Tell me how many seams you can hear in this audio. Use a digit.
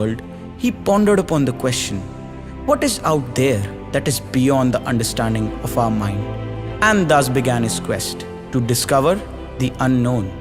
1